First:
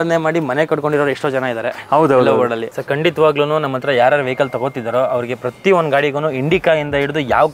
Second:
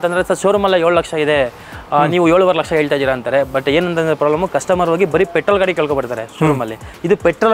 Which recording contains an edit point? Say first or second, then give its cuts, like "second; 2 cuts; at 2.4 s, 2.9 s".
first; 1 cut; at 2.7 s